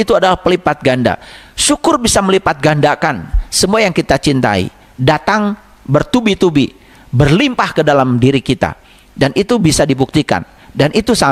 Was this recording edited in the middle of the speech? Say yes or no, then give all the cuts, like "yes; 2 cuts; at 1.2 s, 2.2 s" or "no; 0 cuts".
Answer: no; 0 cuts